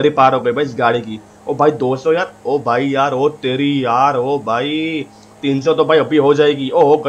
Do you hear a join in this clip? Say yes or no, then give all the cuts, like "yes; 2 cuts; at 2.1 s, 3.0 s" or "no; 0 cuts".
no; 0 cuts